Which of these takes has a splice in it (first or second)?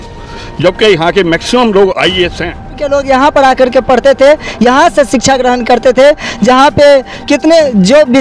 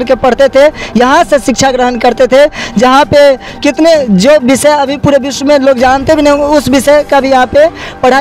first